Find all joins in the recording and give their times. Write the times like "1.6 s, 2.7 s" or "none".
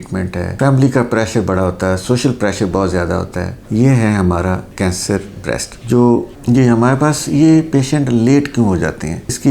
6.3 s